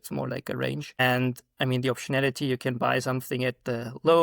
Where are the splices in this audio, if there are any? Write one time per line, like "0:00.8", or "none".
0:01.0